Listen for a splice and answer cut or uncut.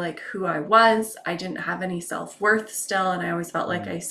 uncut